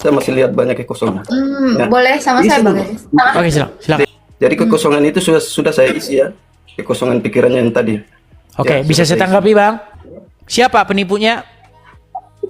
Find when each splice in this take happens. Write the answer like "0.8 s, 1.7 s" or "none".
4.2 s, 9.9 s